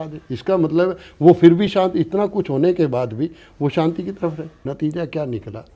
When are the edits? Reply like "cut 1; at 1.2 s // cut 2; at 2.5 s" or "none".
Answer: cut 1; at 4.5 s